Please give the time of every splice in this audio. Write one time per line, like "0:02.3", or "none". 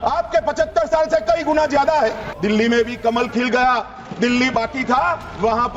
0:02.3

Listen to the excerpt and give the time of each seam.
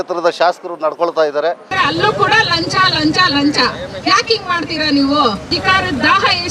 0:01.7
0:05.5

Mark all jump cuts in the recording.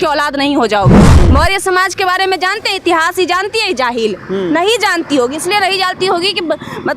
0:01.1

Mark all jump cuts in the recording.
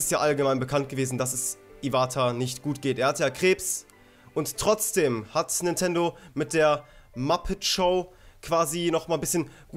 0:05.9

